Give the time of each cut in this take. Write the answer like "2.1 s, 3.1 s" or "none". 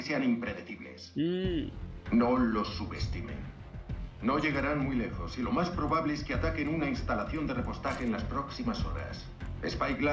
none